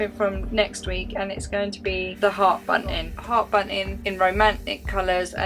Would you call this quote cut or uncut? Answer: cut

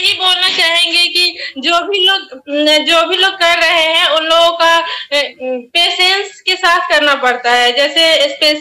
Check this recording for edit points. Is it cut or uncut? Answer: uncut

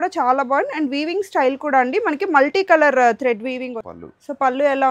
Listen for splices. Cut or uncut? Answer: cut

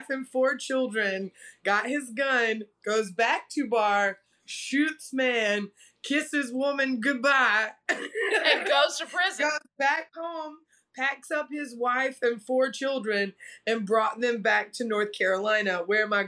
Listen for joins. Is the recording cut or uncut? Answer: uncut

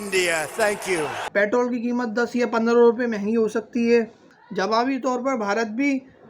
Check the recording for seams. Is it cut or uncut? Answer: cut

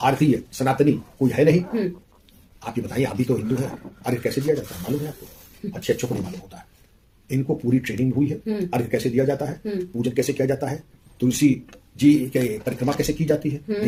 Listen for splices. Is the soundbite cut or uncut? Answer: uncut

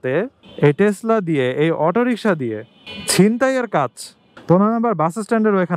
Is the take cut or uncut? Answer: cut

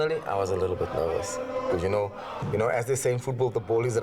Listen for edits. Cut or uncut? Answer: uncut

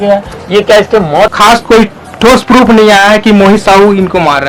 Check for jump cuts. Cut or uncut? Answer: cut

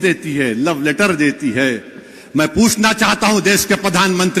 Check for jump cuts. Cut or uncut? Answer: uncut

